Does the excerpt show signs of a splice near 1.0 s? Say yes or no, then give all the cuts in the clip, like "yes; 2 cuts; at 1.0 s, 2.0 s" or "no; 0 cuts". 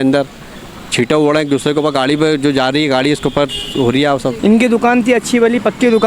no; 1 cut; at 4.4 s